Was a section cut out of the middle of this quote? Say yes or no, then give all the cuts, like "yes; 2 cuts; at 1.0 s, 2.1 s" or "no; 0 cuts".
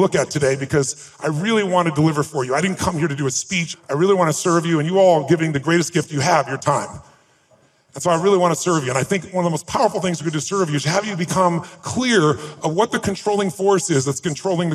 yes; 2 cuts; at 3.6 s, 7.5 s